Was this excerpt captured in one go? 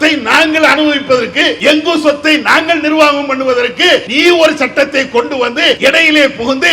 no; 3 cuts; at 1.5 s, 4.1 s, 5.8 s

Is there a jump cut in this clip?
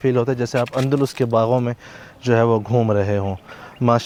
no; 0 cuts

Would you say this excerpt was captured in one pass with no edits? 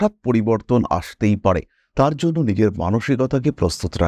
yes; 0 cuts

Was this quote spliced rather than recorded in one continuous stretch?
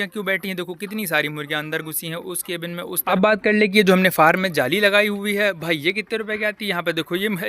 yes; 1 cut; at 2.9 s

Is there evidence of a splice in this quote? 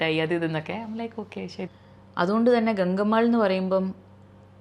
yes; 1 cut; at 1.7 s

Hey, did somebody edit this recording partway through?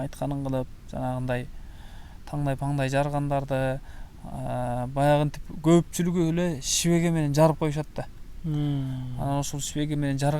no; 0 cuts

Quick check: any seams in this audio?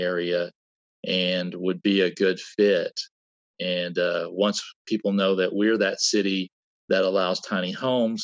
no; 0 cuts

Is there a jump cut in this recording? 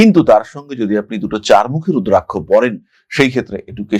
no; 0 cuts

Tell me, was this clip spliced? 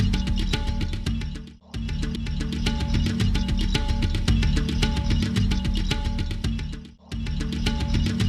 yes; 1 cut; at 2.1 s

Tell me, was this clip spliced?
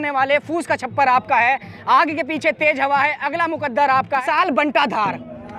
yes; 1 cut; at 4.2 s

